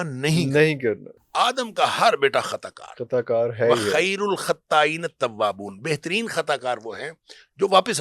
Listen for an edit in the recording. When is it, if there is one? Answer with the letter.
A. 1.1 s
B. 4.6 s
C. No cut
A